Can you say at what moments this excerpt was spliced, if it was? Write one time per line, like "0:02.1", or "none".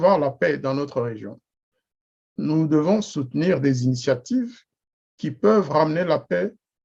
none